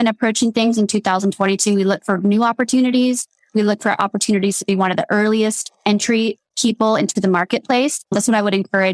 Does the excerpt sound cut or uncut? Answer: uncut